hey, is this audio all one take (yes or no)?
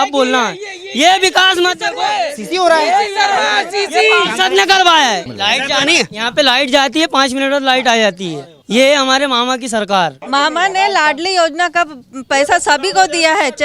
no